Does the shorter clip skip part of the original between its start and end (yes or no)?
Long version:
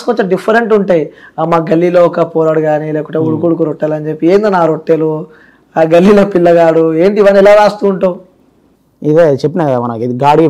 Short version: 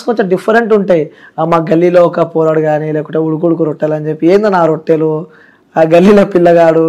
no